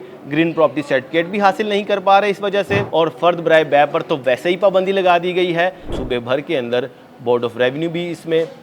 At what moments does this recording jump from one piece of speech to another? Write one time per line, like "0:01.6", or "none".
0:02.8
0:05.9